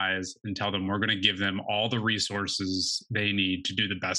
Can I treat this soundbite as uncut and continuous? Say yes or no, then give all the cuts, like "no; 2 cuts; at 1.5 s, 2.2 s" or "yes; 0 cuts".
yes; 0 cuts